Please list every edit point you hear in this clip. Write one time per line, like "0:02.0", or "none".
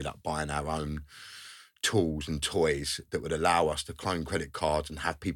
none